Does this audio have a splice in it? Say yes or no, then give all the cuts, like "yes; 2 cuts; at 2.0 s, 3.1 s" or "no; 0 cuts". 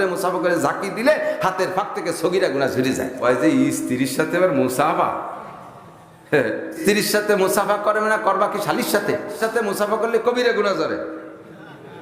yes; 3 cuts; at 3.1 s, 6.8 s, 9.4 s